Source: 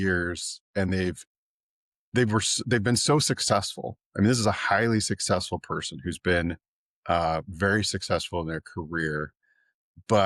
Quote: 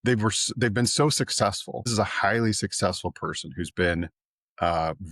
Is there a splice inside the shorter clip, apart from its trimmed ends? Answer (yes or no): yes